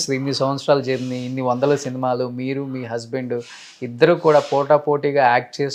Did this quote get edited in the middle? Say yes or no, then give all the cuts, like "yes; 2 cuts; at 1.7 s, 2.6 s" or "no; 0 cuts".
no; 0 cuts